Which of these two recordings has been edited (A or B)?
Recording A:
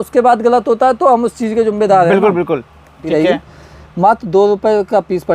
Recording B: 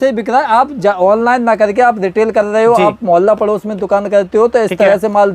A